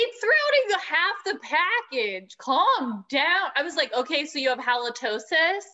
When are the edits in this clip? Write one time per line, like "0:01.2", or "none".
none